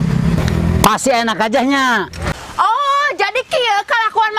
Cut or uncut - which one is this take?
cut